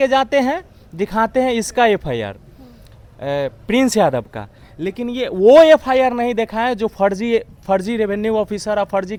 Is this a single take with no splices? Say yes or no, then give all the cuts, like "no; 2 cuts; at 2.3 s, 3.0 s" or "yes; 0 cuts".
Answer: yes; 0 cuts